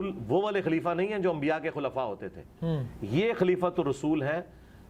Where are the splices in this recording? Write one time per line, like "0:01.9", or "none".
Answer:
none